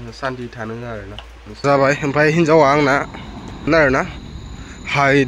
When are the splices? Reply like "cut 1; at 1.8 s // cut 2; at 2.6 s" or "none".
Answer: cut 1; at 1.6 s // cut 2; at 3.7 s